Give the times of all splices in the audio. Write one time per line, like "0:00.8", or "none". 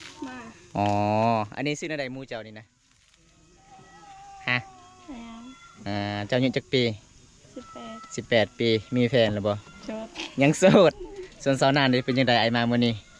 none

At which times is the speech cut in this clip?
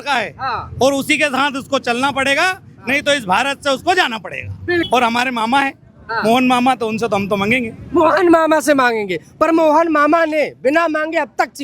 0:04.9

